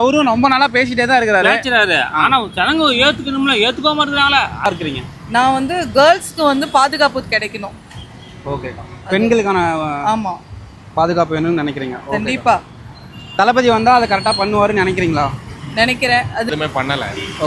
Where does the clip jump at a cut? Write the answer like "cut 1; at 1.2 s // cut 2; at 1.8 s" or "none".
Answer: cut 1; at 4.7 s // cut 2; at 16.5 s